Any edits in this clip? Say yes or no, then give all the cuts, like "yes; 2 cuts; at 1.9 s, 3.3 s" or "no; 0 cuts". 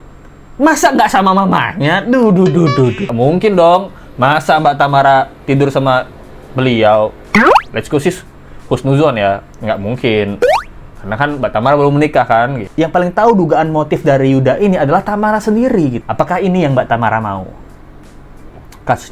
yes; 3 cuts; at 3.1 s, 12.6 s, 16.0 s